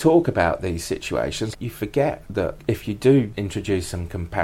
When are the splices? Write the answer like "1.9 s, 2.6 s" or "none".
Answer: 1.5 s, 2.6 s, 3.3 s